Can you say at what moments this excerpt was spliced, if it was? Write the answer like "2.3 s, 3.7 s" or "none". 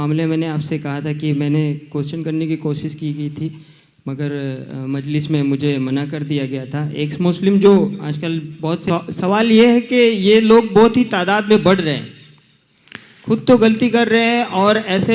8.8 s